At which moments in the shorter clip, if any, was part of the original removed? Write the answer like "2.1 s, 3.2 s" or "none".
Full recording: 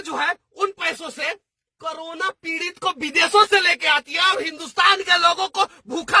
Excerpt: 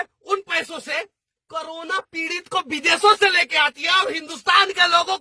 none